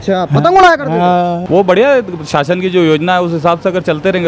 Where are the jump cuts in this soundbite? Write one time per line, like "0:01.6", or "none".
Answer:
0:01.4